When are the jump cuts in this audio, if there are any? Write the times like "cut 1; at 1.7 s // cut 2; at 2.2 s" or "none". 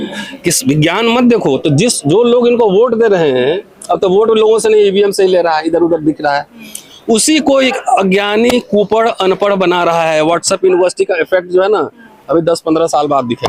none